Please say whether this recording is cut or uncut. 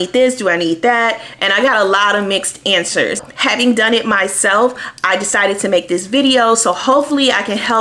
cut